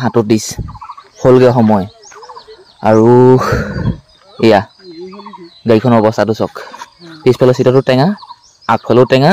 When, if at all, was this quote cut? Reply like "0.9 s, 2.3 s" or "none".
none